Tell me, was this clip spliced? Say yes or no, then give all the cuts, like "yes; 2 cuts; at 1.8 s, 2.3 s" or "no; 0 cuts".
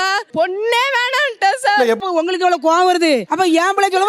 yes; 1 cut; at 2.0 s